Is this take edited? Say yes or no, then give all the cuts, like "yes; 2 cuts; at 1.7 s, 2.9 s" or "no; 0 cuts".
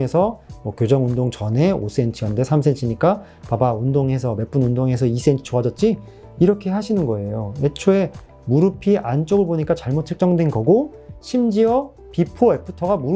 no; 0 cuts